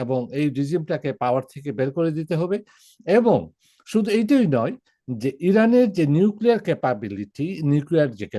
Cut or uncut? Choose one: uncut